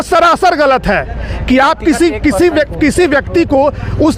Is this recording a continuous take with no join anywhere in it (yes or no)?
yes